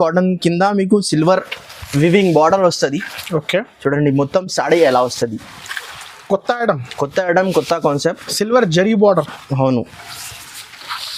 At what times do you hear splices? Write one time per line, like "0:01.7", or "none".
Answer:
none